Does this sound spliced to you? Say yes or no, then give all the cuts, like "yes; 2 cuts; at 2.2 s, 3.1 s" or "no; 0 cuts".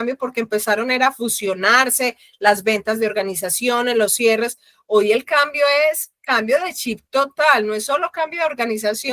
no; 0 cuts